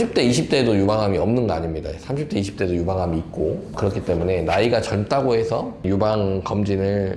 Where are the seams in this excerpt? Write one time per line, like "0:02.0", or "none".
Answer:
none